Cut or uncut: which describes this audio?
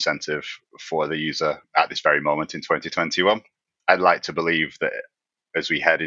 cut